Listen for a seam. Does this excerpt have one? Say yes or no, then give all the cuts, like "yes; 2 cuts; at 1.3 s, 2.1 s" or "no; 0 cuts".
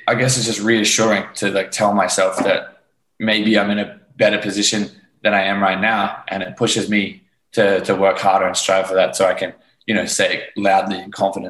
no; 0 cuts